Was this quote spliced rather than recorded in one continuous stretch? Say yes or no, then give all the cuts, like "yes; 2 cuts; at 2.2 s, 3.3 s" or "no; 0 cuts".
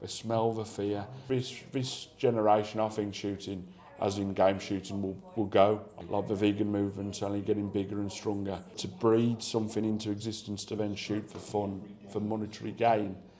yes; 3 cuts; at 1.1 s, 5.9 s, 8.9 s